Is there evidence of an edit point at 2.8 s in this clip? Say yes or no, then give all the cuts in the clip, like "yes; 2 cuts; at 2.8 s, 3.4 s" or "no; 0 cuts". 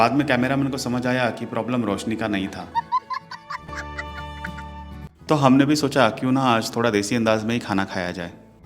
no; 1 cut; at 5.1 s